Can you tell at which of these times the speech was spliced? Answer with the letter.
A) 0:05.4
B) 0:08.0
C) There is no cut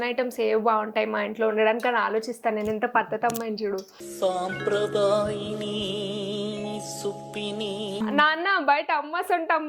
B